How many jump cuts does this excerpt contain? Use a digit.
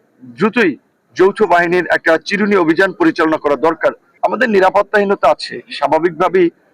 1